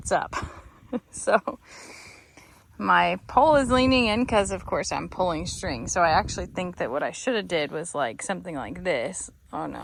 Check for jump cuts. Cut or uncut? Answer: uncut